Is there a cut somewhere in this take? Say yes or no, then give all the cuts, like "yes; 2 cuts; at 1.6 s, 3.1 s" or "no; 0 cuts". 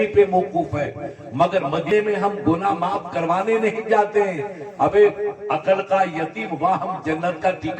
yes; 1 cut; at 1.9 s